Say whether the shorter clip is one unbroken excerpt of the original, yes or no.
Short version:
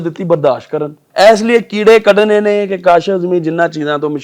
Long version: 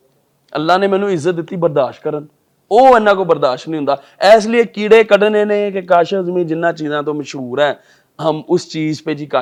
no